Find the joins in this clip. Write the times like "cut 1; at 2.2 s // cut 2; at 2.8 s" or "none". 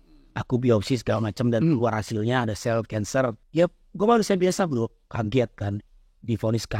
cut 1; at 3.4 s